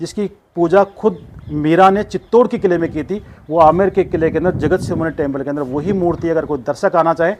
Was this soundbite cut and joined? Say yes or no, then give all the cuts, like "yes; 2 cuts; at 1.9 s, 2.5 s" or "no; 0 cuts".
no; 0 cuts